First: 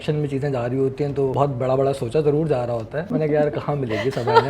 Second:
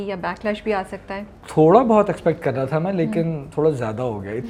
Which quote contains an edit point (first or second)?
first